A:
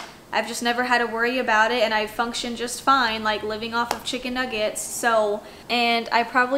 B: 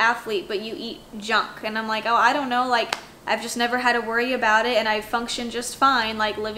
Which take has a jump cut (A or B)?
A